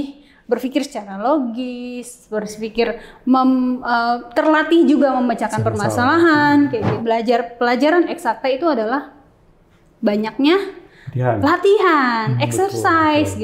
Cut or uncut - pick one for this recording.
cut